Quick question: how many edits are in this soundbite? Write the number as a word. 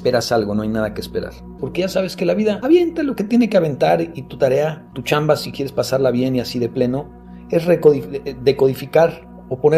three